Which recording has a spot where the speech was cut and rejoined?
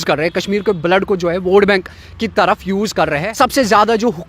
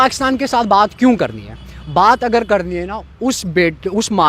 first; 1 cut; at 3.3 s

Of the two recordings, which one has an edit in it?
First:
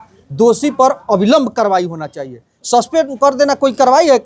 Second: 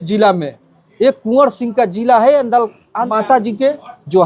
second; 1 cut; at 3.1 s

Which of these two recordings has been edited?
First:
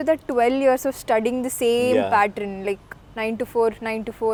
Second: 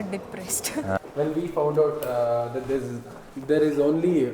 second; 1 cut; at 1.0 s

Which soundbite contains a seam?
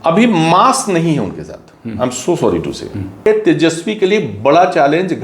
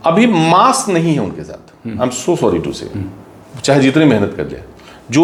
first; 1 cut; at 3.3 s

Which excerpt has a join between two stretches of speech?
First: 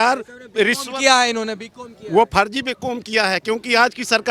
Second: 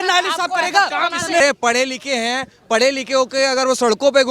second; 1 cut; at 1.4 s

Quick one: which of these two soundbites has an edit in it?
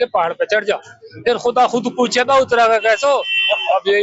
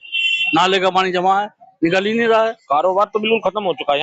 second; 1 cut; at 2.4 s

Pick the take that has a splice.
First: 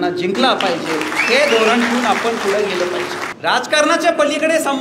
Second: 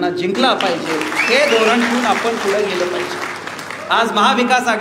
first; 1 cut; at 3.2 s

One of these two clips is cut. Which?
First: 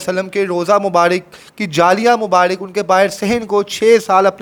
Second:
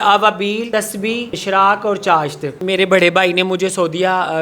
second; 2 cuts; at 1.3 s, 2.5 s

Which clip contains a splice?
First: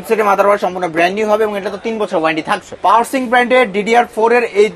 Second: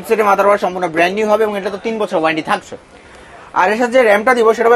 first; 1 cut; at 2.6 s

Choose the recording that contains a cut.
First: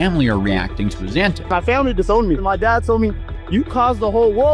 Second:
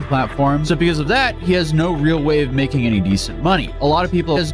first; 1 cut; at 1.4 s

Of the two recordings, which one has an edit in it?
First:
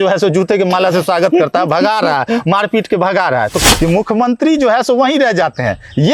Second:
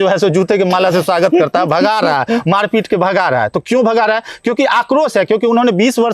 first; 1 cut; at 3.6 s

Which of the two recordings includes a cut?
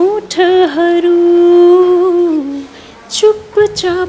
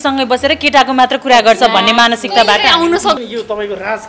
second; 1 cut; at 3.2 s

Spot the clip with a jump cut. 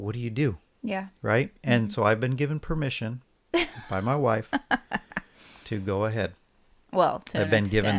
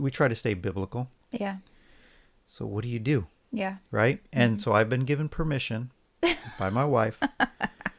second; 1 cut; at 1.1 s

